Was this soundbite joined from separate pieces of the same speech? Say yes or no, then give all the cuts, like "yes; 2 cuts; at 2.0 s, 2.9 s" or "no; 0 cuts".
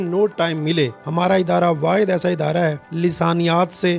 yes; 2 cuts; at 1.0 s, 2.9 s